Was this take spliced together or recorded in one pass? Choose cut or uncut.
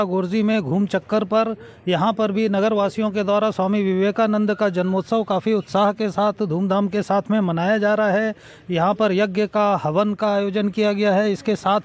uncut